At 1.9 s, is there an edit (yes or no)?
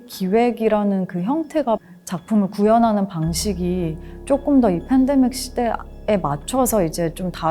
yes